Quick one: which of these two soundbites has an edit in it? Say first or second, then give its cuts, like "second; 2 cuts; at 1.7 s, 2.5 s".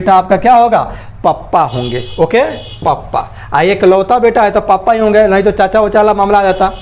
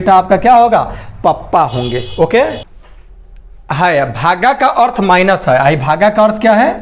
second; 1 cut; at 2.7 s